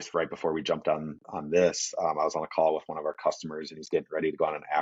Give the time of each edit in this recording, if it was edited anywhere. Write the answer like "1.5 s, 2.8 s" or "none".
none